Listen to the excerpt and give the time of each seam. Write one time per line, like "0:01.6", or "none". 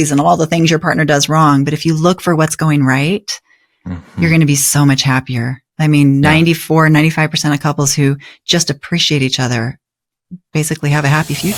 none